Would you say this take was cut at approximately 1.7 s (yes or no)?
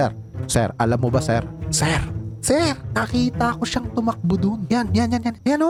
no